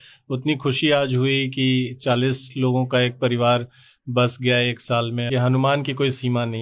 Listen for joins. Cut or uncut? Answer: cut